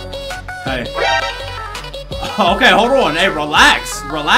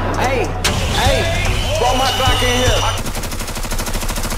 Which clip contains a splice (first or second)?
second